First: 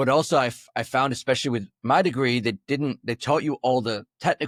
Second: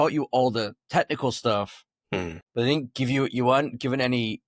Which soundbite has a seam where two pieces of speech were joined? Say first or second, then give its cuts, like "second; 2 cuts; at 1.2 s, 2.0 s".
second; 1 cut; at 2.4 s